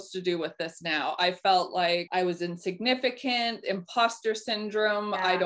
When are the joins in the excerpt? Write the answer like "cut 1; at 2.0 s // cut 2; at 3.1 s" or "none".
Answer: cut 1; at 2.1 s